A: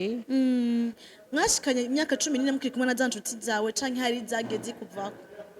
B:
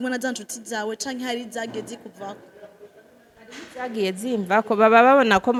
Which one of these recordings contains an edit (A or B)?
A